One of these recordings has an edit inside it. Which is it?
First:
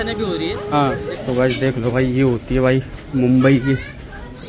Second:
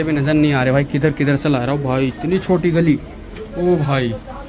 first; 1 cut; at 1.1 s

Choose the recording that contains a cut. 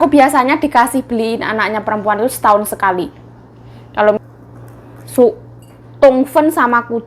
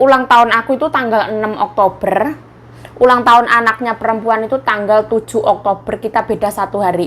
first; 1 cut; at 4.2 s

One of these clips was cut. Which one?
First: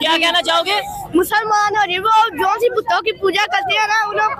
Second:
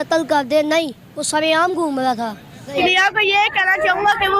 second; 1 cut; at 2.8 s

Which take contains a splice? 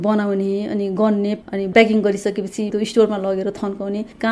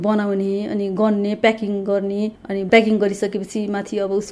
first; 2 cuts; at 1.4 s, 2.7 s

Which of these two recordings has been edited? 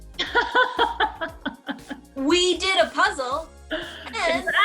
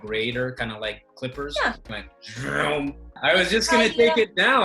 second; 2 cuts; at 2.0 s, 3.1 s

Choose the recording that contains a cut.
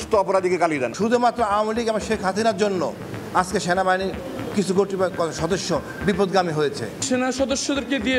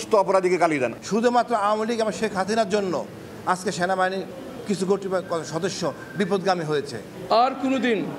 first; 2 cuts; at 0.9 s, 7.0 s

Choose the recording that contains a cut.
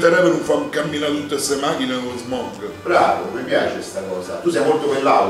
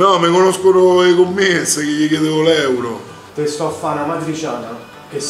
second; 1 cut; at 3.3 s

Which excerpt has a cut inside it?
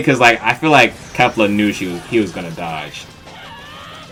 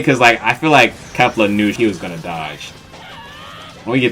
second; 1 cut; at 1.8 s

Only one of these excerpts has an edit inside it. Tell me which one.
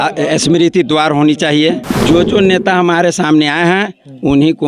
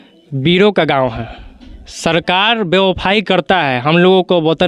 first; 1 cut; at 1.9 s

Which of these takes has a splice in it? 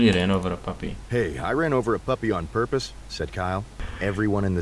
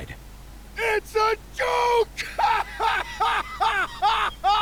first; 1 cut; at 3.7 s

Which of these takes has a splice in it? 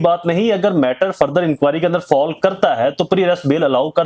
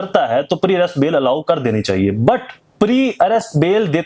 second; 1 cut; at 2.6 s

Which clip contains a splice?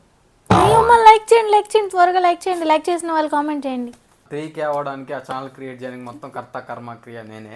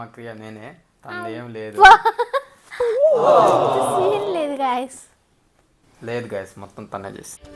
first; 1 cut; at 4.1 s

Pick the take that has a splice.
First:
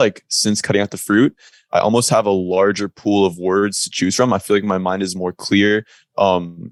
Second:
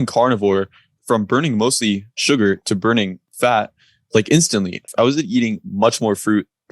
second; 4 cuts; at 1.0 s, 2.1 s, 3.2 s, 4.9 s

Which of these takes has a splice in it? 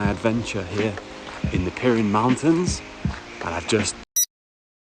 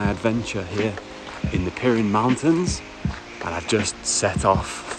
second; 1 cut; at 4.1 s

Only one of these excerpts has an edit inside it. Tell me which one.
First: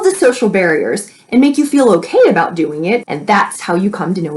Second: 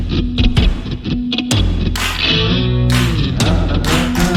first; 1 cut; at 3.1 s

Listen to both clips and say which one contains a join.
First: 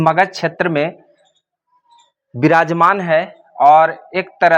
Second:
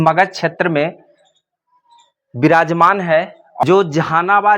second; 1 cut; at 3.6 s

